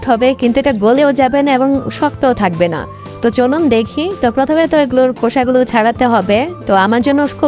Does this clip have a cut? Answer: no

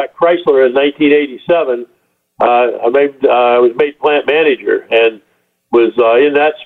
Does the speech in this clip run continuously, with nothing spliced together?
yes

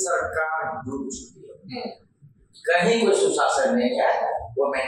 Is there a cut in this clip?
no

